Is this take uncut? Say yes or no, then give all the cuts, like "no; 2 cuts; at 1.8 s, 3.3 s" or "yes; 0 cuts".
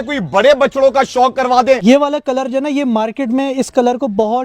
no; 1 cut; at 1.8 s